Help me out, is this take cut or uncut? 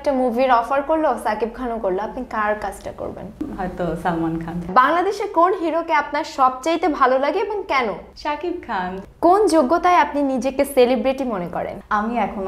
cut